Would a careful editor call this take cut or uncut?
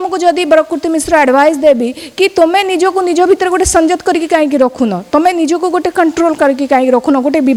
uncut